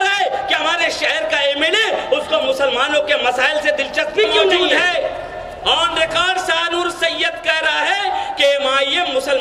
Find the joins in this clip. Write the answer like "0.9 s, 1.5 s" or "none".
4.5 s